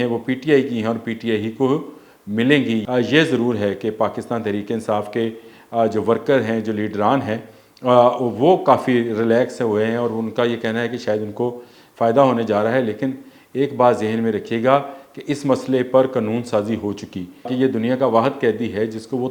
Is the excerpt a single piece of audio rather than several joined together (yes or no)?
no